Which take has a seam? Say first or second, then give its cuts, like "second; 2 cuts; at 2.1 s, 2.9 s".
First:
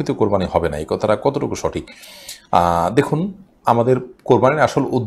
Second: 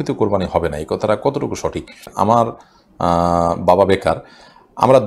second; 1 cut; at 2.1 s